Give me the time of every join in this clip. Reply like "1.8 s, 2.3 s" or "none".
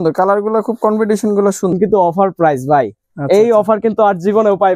1.7 s